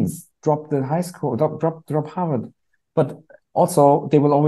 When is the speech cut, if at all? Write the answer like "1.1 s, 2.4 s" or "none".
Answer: none